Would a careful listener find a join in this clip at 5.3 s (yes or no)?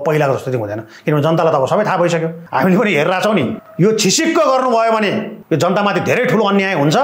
yes